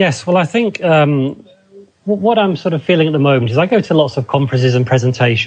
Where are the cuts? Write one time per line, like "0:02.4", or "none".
0:03.3